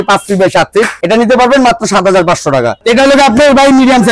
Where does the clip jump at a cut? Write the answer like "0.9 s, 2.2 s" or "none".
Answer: 1.0 s, 2.8 s